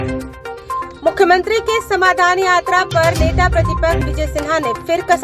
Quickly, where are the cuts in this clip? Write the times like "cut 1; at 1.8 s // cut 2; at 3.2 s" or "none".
cut 1; at 0.9 s

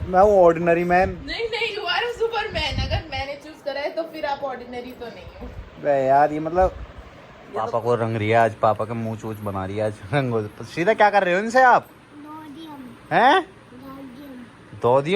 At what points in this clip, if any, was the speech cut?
cut 1; at 7.7 s

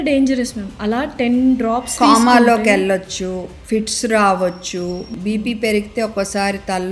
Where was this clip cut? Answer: cut 1; at 3.5 s // cut 2; at 5.1 s

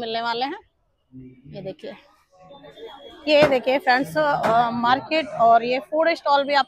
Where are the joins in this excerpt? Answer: cut 1; at 2.8 s

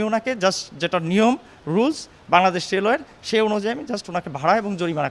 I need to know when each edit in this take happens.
none

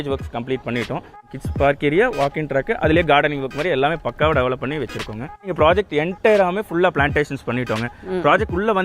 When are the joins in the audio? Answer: cut 1; at 1.3 s // cut 2; at 5.5 s

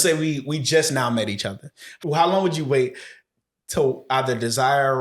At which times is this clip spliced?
cut 1; at 1.8 s

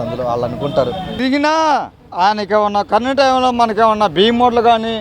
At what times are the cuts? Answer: cut 1; at 1.1 s

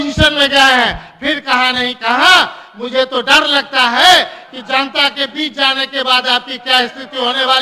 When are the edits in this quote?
none

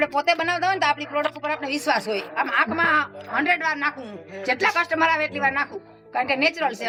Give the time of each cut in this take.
none

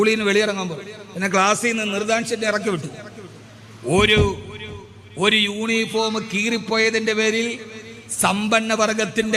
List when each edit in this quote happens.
none

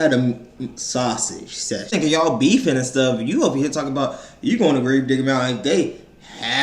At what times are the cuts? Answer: cut 1; at 1.9 s

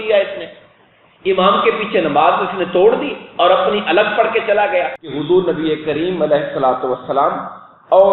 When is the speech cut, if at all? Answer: cut 1; at 5.0 s

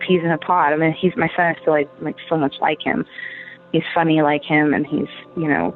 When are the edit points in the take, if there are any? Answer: none

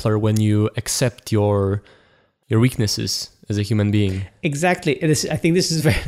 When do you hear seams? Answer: cut 1; at 4.3 s

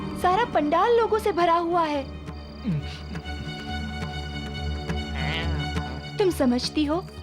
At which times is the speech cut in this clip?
none

